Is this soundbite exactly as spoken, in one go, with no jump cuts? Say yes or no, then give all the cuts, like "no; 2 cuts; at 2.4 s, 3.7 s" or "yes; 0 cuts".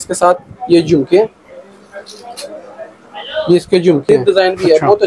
no; 1 cut; at 4.0 s